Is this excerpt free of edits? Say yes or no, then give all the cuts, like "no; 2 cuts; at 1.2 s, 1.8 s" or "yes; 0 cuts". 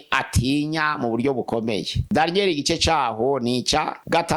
no; 1 cut; at 2.0 s